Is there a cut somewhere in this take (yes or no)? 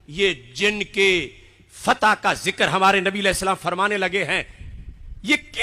no